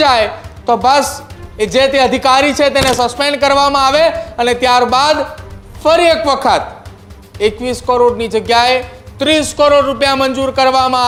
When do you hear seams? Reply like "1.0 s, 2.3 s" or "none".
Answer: none